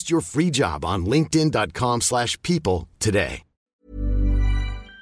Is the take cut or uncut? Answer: cut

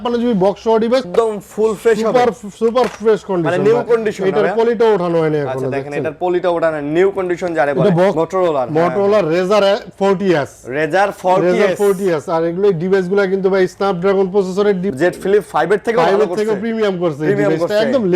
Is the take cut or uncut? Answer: cut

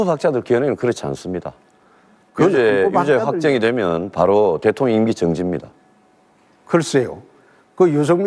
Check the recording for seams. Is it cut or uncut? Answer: cut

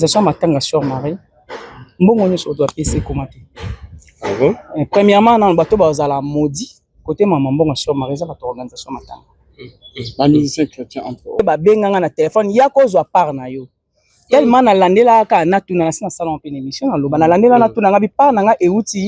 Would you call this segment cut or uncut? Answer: cut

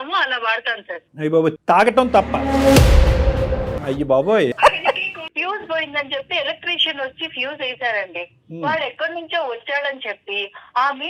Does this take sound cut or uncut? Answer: cut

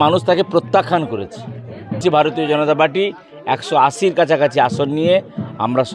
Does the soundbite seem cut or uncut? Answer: cut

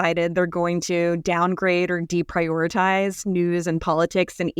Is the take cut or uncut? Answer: uncut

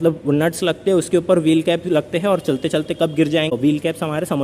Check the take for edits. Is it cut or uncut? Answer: cut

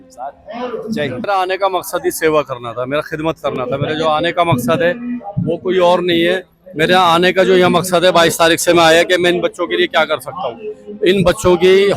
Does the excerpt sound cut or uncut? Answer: cut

